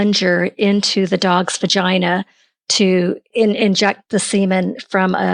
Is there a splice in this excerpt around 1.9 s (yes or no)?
no